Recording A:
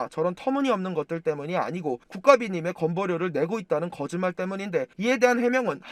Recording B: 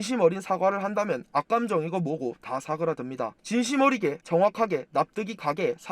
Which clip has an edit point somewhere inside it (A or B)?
B